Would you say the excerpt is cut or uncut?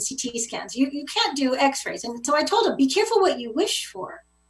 cut